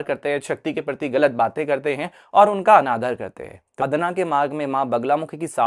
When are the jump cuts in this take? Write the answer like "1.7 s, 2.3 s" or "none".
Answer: 3.8 s